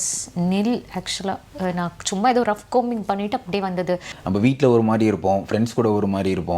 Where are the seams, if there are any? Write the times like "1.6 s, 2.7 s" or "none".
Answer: 4.1 s

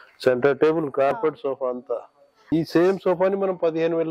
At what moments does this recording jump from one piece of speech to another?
2.5 s

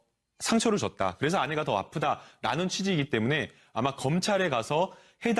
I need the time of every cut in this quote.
3.5 s

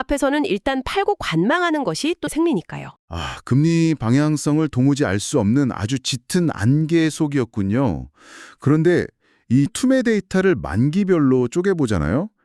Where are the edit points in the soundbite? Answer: 2.3 s, 9.7 s

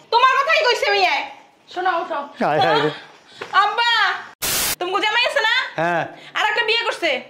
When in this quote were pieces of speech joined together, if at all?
4.6 s

